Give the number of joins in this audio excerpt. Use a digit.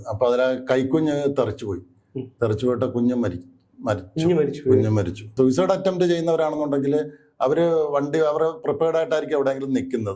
1